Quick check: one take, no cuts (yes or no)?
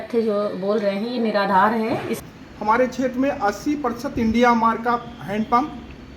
no